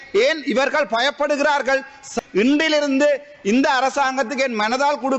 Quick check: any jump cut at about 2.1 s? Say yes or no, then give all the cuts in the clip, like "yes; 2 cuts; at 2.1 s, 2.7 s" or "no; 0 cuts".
yes; 1 cut; at 2.1 s